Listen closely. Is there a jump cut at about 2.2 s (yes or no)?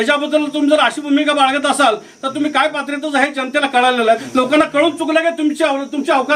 no